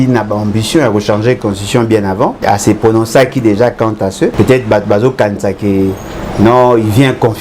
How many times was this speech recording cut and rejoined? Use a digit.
2